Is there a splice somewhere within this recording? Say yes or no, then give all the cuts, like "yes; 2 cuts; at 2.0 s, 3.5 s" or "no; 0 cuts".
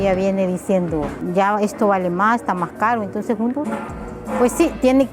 yes; 1 cut; at 1.2 s